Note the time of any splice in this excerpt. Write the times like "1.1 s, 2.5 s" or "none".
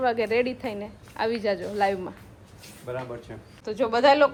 none